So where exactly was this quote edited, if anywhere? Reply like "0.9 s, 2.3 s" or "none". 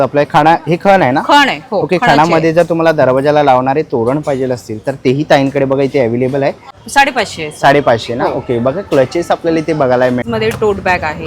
6.7 s, 10.2 s